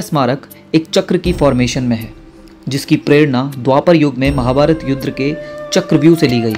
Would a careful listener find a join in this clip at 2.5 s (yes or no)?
no